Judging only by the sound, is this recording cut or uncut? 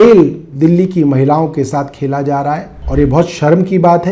cut